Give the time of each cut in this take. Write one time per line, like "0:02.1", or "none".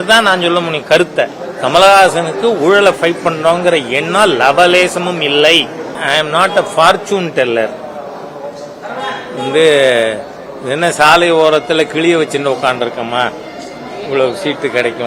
0:05.9